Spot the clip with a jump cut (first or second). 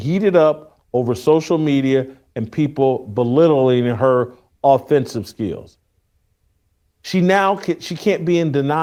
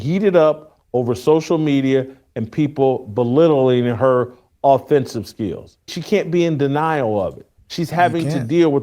second